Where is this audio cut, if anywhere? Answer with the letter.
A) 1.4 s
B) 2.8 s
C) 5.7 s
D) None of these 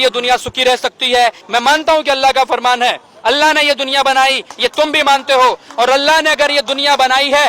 A